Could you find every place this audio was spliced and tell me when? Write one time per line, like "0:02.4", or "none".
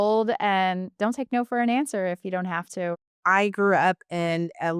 0:03.0

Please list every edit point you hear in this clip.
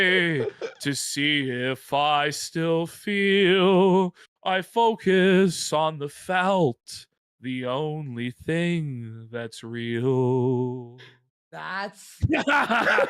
0:11.7

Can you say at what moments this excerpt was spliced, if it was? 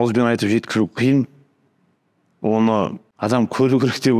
0:03.0

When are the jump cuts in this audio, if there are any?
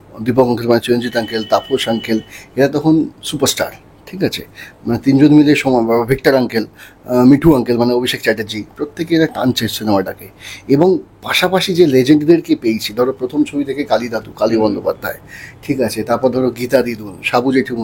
none

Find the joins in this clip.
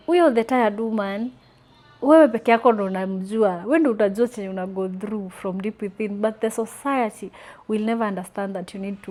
none

